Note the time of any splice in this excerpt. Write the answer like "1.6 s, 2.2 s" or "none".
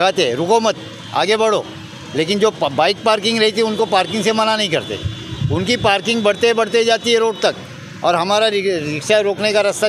none